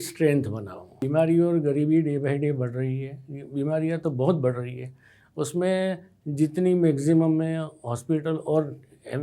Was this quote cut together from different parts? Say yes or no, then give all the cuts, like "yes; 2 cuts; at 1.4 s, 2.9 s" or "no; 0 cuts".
yes; 1 cut; at 0.9 s